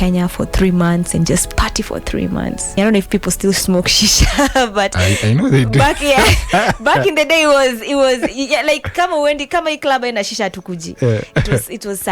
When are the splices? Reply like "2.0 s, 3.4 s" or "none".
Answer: 2.7 s